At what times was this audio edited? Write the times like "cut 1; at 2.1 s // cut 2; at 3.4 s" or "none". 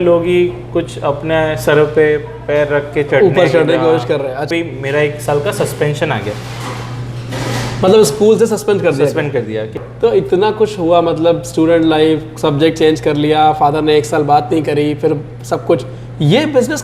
cut 1; at 4.5 s // cut 2; at 9.8 s